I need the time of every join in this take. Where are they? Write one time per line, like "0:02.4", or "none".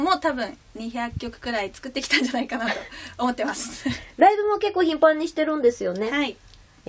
0:02.9